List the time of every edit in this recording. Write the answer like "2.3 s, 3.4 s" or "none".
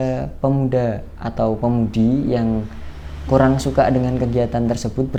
none